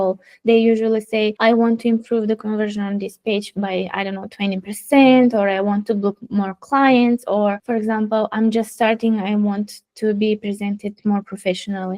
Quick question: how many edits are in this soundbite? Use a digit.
2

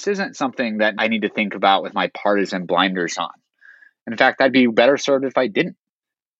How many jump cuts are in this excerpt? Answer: 1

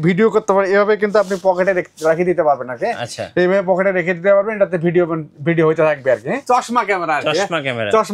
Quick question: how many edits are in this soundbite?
1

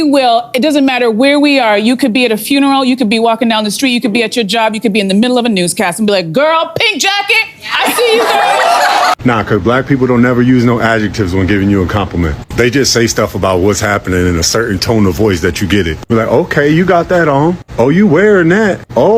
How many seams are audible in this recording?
1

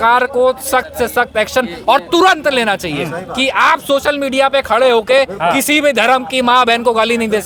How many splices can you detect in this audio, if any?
0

